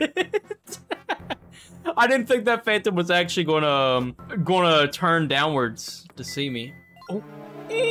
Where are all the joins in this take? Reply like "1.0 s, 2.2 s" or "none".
4.2 s